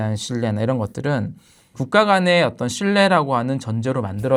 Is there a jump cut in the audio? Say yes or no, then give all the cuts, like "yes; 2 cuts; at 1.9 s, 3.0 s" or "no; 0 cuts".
no; 0 cuts